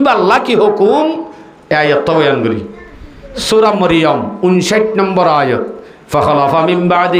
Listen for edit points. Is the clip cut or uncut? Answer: uncut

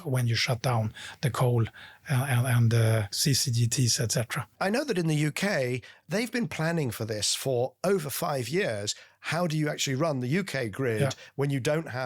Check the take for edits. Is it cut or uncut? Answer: cut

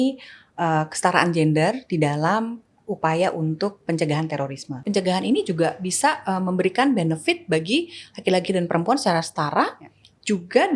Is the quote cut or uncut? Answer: cut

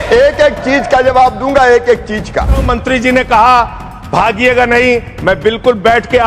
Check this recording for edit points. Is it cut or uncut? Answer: cut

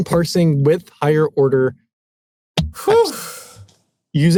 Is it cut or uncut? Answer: uncut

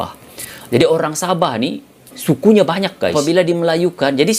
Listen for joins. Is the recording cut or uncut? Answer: cut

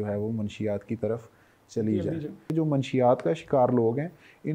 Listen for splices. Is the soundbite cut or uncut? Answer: cut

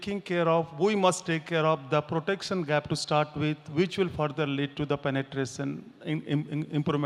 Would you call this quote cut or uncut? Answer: uncut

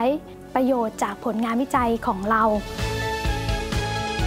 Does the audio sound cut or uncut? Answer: cut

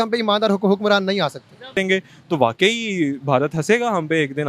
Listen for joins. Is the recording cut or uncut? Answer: cut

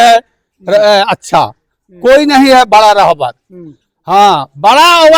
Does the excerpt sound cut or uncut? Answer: uncut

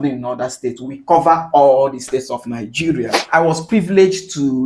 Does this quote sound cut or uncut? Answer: cut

